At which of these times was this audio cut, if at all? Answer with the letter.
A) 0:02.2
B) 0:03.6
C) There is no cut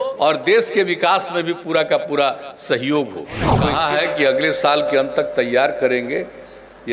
B